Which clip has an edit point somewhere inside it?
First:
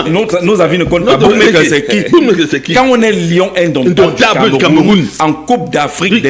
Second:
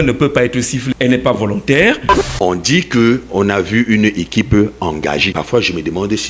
second; 3 cuts; at 0.9 s, 2.1 s, 5.3 s

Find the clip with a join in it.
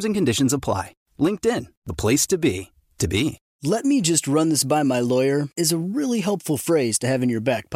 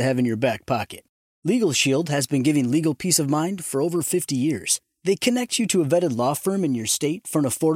first; 1 cut; at 3.5 s

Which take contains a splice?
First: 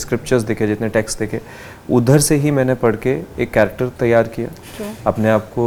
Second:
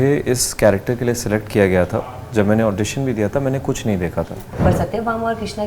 second; 1 cut; at 4.4 s

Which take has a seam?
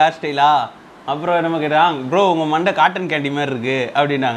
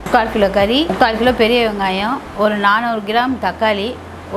second; 1 cut; at 0.9 s

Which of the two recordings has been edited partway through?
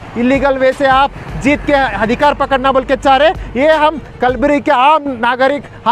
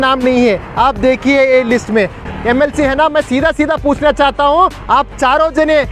second; 1 cut; at 2.2 s

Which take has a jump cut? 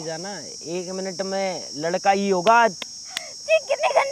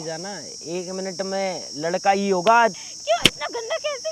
second; 1 cut; at 2.9 s

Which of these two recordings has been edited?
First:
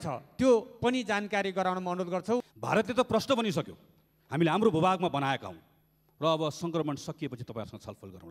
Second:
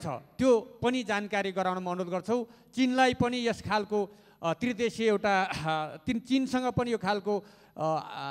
first; 1 cut; at 2.5 s

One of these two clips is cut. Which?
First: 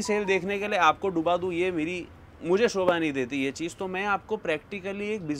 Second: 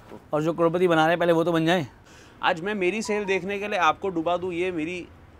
second; 1 cut; at 2.0 s

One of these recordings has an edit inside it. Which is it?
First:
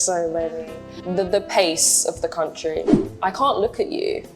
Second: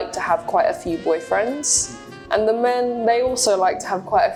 first; 1 cut; at 3.0 s

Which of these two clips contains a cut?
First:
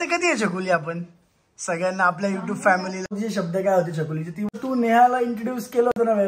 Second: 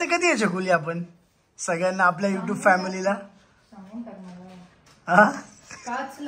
first; 2 cuts; at 3.0 s, 4.5 s

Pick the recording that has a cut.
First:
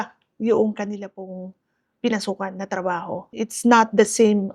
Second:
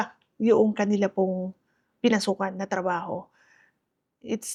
first; 1 cut; at 3.3 s

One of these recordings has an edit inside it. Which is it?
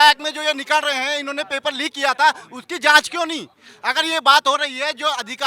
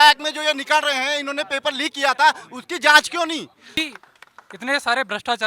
second; 1 cut; at 3.8 s

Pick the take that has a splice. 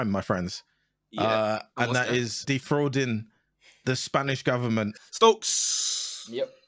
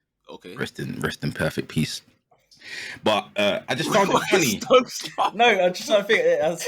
first; 2 cuts; at 2.4 s, 5.0 s

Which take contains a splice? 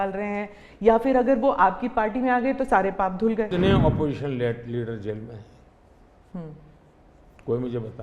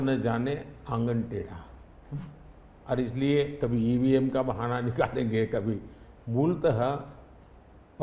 first; 1 cut; at 3.5 s

